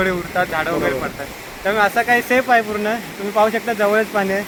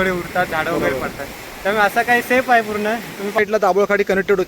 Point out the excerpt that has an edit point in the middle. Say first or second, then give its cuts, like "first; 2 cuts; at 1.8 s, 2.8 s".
second; 1 cut; at 3.4 s